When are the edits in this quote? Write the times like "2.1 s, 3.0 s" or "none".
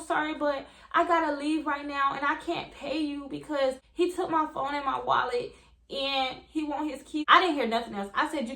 3.8 s, 7.2 s